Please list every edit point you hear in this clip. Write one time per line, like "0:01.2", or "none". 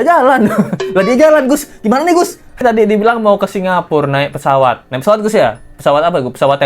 0:02.6